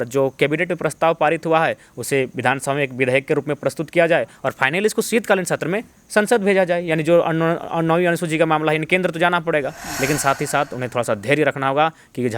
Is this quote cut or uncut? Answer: cut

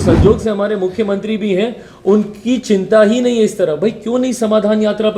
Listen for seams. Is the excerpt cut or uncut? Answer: uncut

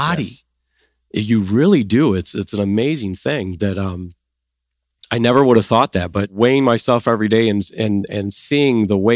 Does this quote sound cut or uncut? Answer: cut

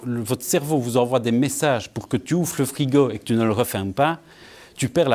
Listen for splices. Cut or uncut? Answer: uncut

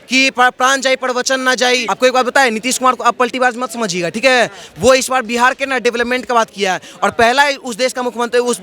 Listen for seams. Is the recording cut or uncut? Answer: cut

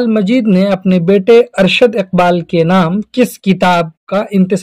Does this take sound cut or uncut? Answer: uncut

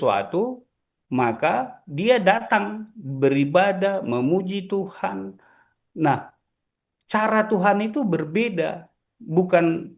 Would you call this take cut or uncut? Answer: uncut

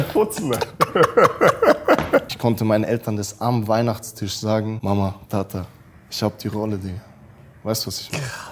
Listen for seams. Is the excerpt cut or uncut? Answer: cut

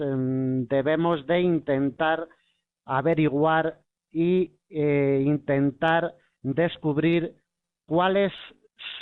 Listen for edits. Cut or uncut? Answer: cut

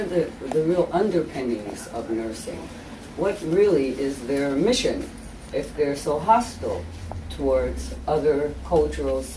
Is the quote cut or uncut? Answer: uncut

